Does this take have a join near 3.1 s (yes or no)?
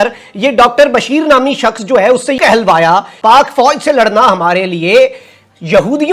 yes